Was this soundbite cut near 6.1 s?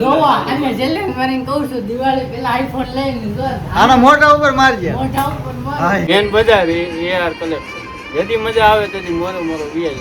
yes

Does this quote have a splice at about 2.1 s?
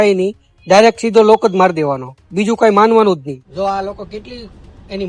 no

